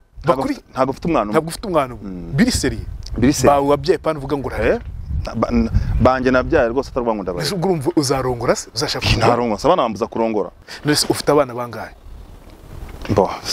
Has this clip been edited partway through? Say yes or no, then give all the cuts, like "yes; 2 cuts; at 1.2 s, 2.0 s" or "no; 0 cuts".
yes; 1 cut; at 10.7 s